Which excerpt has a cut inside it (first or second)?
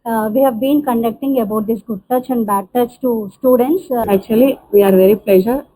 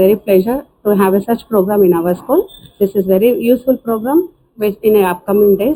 first